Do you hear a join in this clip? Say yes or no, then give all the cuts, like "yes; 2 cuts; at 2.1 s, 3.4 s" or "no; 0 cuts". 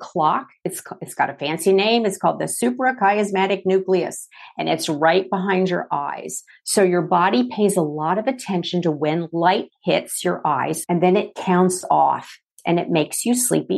yes; 2 cuts; at 10.8 s, 12.5 s